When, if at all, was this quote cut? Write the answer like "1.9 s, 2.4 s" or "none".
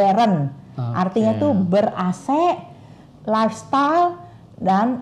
none